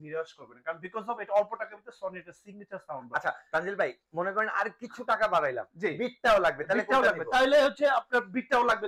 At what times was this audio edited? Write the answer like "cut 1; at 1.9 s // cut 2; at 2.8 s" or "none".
none

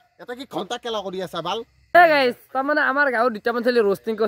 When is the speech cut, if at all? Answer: cut 1; at 1.8 s

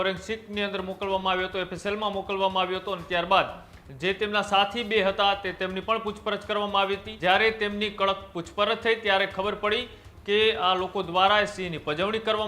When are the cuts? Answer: cut 1; at 7.1 s

